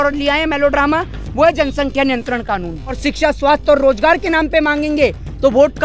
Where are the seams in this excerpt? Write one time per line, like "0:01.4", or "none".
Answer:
0:03.0